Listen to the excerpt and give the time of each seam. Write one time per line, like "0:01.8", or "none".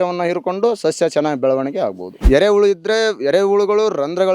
0:02.1